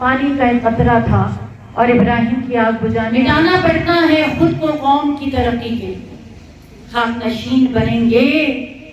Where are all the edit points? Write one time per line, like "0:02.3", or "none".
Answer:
0:03.1